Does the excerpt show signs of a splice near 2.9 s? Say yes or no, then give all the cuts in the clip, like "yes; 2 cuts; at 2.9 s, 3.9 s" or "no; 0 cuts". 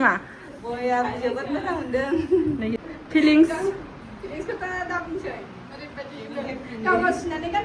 yes; 1 cut; at 2.9 s